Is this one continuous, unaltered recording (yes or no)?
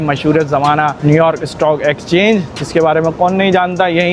no